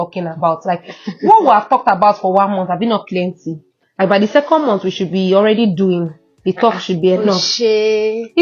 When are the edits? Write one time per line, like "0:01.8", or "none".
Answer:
none